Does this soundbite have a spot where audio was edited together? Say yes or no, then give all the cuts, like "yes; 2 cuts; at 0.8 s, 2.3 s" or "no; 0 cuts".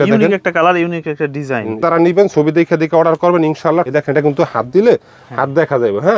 yes; 2 cuts; at 1.8 s, 3.9 s